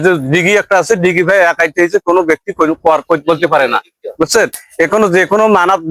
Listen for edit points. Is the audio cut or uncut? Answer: uncut